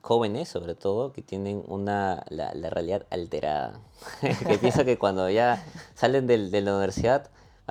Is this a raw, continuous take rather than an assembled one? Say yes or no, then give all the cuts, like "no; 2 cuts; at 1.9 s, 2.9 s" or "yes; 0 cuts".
yes; 0 cuts